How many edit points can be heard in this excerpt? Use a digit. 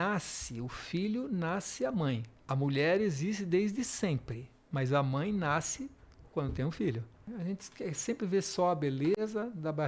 2